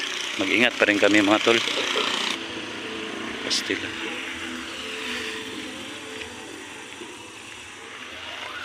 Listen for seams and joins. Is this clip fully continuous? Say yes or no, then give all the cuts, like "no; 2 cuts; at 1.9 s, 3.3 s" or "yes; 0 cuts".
no; 1 cut; at 2.3 s